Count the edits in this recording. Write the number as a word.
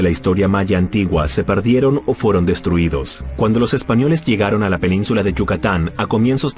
one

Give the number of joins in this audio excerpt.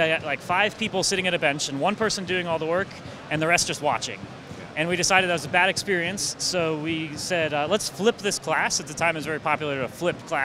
zero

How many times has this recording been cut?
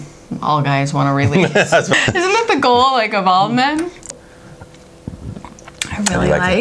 two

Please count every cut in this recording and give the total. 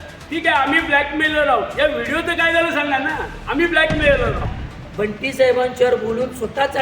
one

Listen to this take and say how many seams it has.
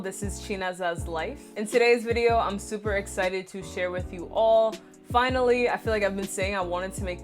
one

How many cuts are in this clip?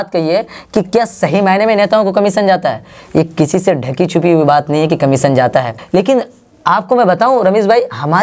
one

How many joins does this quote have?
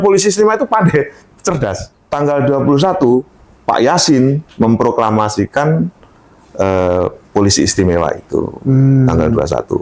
one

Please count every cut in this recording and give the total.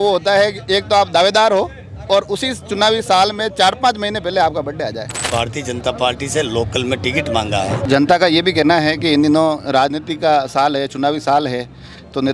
two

